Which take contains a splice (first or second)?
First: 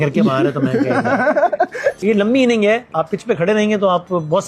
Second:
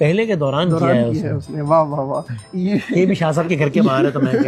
first